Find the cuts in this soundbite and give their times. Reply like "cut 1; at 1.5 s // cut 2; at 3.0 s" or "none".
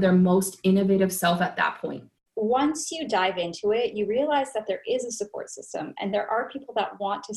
cut 1; at 2.2 s